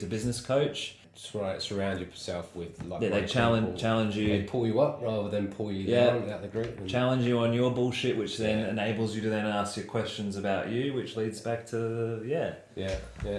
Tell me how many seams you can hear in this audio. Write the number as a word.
one